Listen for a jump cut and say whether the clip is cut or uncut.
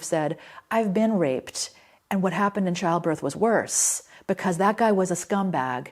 uncut